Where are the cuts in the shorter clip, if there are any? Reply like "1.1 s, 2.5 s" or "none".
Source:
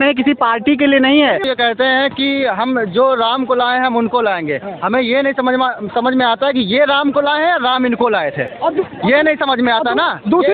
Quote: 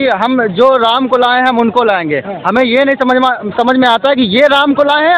none